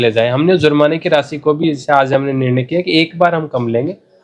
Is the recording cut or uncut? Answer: uncut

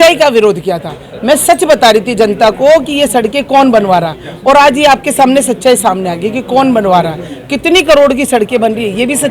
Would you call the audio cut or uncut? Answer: uncut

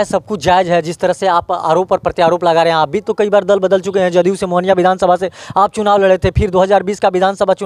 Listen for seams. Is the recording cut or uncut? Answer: uncut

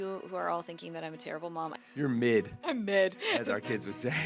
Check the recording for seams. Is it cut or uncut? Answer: cut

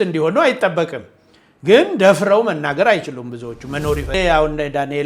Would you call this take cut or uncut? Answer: cut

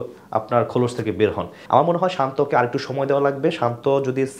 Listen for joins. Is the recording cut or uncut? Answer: cut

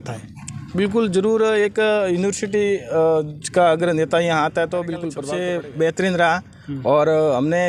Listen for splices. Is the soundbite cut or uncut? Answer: cut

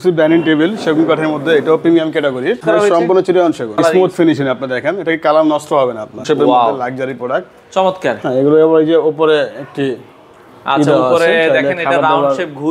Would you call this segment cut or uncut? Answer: cut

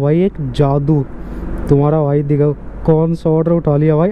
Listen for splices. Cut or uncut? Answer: uncut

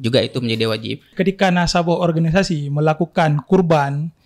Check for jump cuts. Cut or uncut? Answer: cut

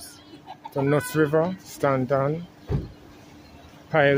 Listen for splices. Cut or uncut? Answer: cut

